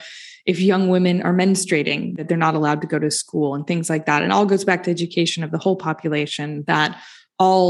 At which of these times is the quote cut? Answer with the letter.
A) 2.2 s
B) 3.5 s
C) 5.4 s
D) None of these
A